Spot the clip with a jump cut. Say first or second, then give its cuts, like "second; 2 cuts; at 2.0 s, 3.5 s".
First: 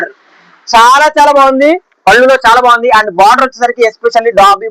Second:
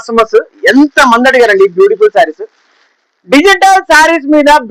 first; 1 cut; at 1.9 s